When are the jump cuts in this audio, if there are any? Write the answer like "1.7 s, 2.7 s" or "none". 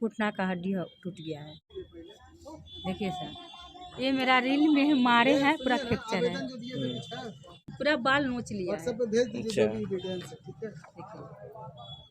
1.7 s, 7.6 s